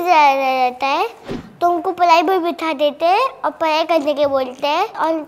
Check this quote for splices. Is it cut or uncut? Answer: uncut